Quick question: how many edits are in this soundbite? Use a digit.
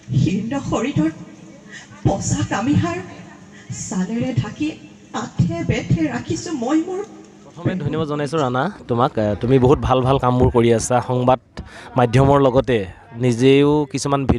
1